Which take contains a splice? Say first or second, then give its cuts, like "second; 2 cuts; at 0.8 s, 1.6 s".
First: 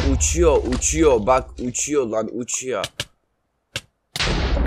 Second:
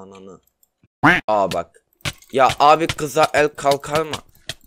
second; 1 cut; at 1.3 s